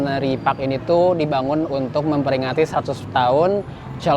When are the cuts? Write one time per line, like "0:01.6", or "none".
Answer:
none